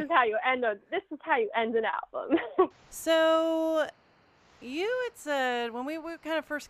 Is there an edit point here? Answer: no; 0 cuts

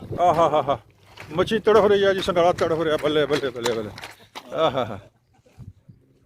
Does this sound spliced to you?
no; 0 cuts

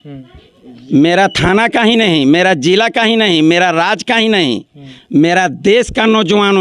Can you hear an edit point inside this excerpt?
no; 0 cuts

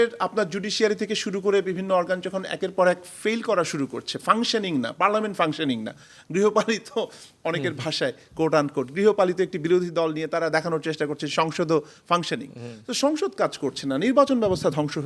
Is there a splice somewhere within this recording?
no; 0 cuts

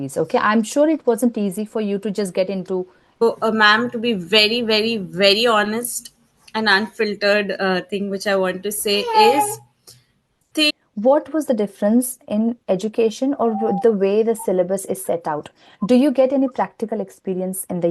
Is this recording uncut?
no; 2 cuts; at 3.2 s, 10.7 s

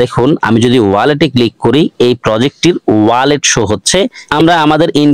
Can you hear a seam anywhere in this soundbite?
yes; 1 cut; at 4.2 s

